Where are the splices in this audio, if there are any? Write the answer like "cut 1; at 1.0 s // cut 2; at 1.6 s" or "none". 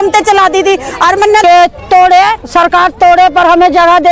cut 1; at 1.4 s